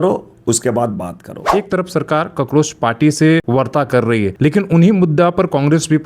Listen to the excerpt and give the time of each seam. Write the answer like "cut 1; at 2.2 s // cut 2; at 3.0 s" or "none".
cut 1; at 1.4 s // cut 2; at 3.4 s // cut 3; at 4.3 s